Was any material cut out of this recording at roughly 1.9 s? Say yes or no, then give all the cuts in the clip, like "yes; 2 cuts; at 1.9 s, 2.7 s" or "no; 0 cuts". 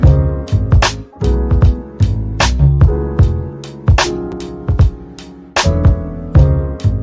no; 1 cut; at 4.3 s